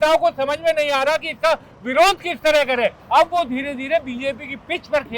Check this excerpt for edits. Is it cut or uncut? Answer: cut